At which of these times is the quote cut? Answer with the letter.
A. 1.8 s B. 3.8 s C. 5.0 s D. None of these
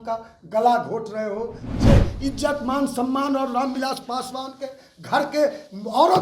A